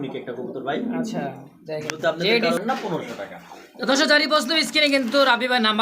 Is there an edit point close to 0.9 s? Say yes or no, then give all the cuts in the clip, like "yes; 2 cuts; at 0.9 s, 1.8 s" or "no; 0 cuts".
no; 1 cut; at 2.6 s